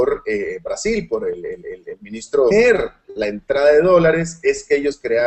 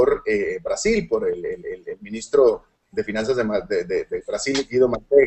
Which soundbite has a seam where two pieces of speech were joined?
second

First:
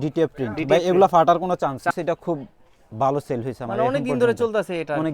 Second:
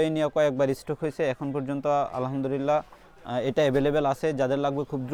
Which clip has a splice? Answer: first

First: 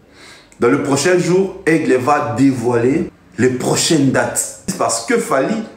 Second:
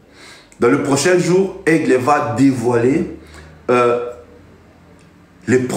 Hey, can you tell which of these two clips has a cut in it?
first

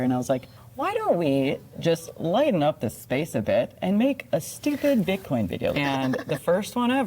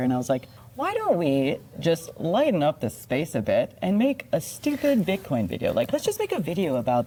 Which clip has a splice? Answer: first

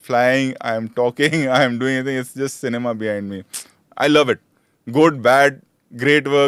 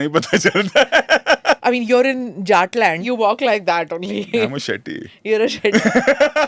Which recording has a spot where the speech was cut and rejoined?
second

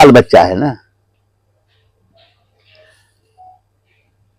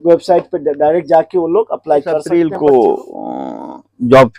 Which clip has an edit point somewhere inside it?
second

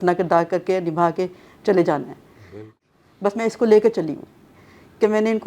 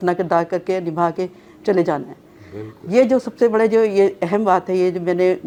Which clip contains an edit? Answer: first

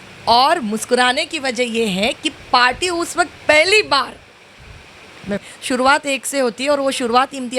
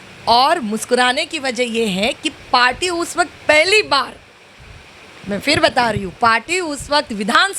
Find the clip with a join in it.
first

